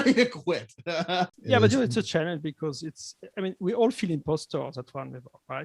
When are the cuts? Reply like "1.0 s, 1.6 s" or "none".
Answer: 1.4 s

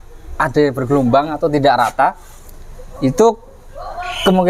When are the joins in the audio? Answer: none

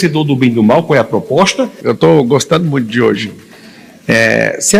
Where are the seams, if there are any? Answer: 1.7 s

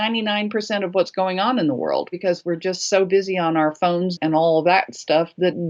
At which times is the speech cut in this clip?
2.2 s

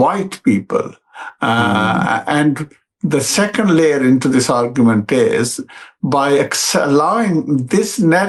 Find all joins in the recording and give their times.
none

